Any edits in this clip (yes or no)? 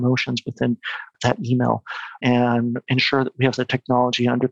yes